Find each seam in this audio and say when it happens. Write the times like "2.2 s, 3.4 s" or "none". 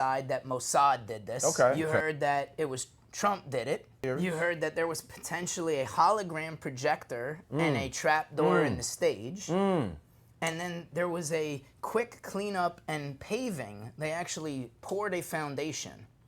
1.3 s, 4.0 s